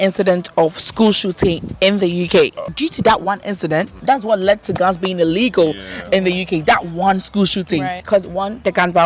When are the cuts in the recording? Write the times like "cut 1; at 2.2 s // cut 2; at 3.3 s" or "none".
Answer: cut 1; at 2.6 s // cut 2; at 4.0 s // cut 3; at 8.0 s